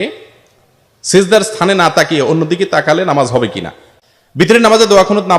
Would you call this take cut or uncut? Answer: cut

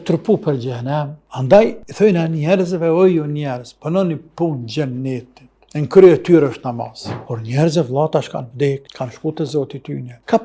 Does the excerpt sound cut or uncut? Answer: cut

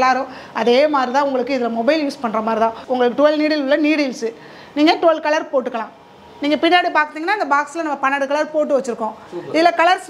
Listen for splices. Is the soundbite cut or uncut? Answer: uncut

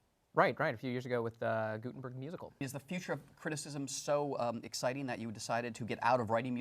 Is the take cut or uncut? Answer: cut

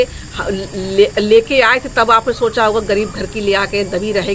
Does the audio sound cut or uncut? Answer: uncut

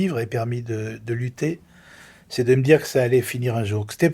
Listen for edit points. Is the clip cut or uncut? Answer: uncut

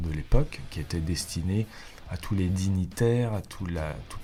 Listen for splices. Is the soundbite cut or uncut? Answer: uncut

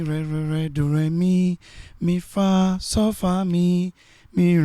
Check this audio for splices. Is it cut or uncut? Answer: uncut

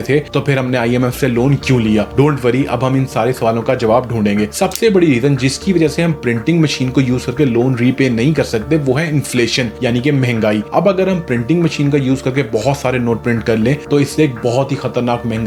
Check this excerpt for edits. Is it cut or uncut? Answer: uncut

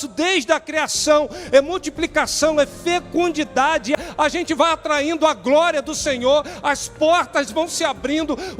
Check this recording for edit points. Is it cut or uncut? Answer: cut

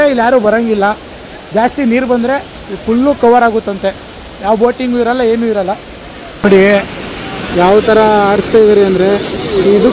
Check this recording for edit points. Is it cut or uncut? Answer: cut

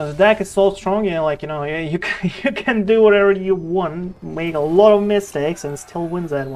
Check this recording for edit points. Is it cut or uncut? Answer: uncut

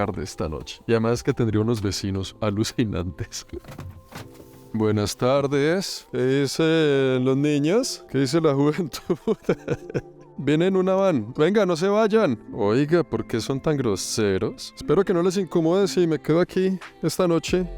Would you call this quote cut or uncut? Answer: cut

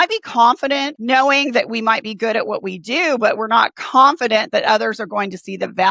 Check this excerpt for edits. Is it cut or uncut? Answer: cut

